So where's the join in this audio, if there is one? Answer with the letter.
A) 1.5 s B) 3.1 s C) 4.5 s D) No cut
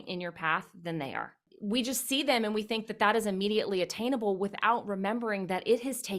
A